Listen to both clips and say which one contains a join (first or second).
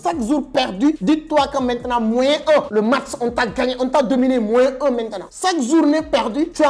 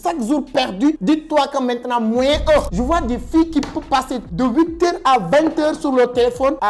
second